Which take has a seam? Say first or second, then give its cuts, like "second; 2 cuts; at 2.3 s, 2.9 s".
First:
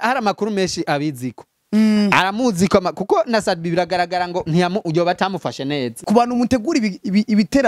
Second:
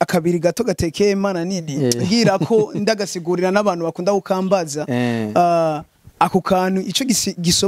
first; 1 cut; at 6.0 s